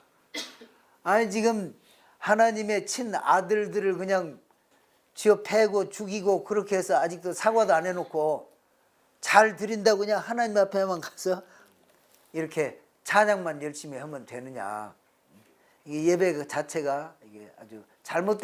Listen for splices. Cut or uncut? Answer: uncut